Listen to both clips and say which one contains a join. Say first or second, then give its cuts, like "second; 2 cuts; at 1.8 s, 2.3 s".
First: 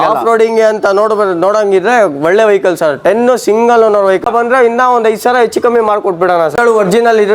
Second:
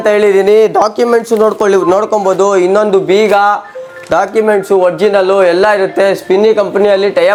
first; 2 cuts; at 4.2 s, 6.6 s